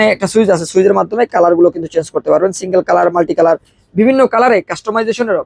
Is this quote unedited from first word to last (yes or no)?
yes